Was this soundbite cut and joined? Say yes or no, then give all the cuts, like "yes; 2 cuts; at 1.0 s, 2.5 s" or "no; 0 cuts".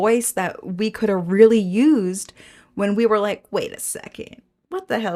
no; 0 cuts